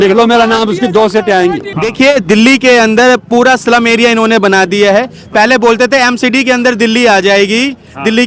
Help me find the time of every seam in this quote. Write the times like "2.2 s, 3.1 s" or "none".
1.7 s